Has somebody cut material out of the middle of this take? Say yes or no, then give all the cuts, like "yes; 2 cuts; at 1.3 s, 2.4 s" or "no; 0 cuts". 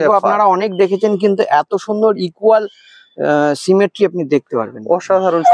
no; 0 cuts